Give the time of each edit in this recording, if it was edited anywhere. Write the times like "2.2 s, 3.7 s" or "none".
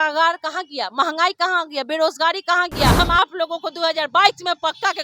2.9 s